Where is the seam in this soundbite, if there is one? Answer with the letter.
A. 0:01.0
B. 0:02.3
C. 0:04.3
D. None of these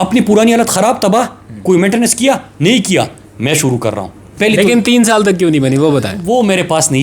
C